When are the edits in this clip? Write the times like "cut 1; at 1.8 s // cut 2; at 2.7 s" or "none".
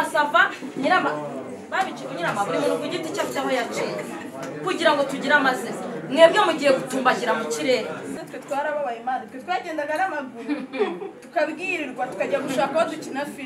cut 1; at 8.1 s